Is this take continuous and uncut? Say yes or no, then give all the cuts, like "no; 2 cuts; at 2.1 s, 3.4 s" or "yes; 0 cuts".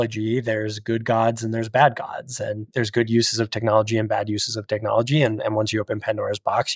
yes; 0 cuts